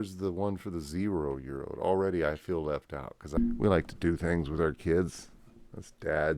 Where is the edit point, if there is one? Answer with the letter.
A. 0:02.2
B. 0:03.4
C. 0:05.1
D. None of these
B